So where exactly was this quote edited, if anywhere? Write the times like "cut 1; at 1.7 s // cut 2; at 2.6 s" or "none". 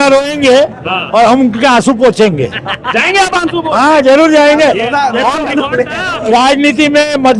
none